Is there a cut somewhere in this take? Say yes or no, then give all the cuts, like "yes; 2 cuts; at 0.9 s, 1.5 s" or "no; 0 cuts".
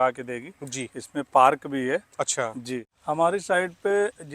yes; 1 cut; at 2.9 s